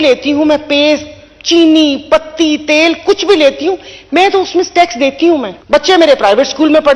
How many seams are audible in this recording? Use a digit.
1